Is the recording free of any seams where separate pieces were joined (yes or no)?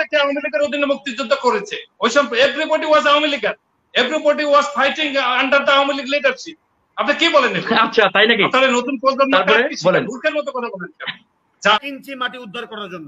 no